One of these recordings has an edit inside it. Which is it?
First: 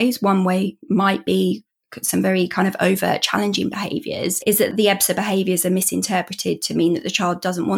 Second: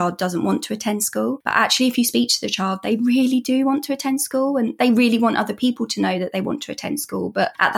first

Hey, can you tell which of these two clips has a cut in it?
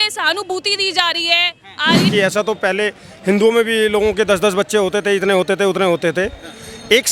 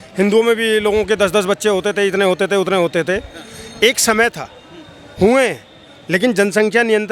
first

